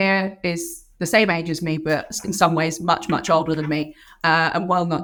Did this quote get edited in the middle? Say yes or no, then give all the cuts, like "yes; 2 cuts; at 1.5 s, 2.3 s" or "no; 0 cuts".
no; 0 cuts